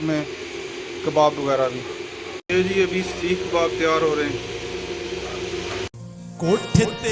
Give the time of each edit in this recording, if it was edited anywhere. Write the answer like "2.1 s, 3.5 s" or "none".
2.4 s, 5.9 s